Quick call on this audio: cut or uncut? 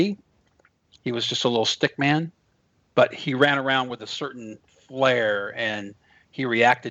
uncut